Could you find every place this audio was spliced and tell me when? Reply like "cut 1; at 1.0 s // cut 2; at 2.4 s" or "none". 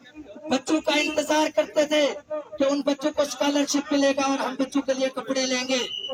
none